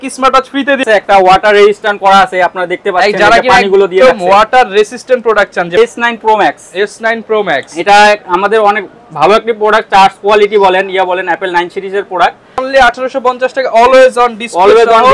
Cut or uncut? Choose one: cut